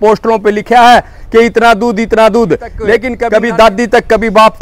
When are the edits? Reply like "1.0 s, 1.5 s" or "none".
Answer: 3.1 s